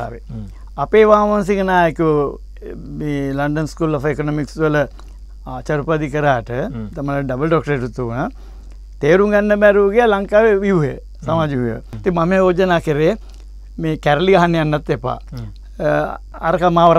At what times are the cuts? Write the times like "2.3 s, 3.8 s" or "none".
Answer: 11.9 s